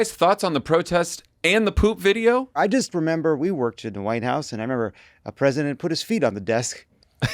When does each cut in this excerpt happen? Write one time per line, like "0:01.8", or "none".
0:02.6